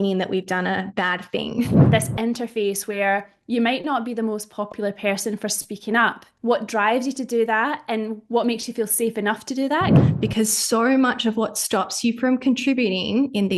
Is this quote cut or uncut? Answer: cut